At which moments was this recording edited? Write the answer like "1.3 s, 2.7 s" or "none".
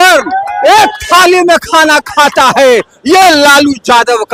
none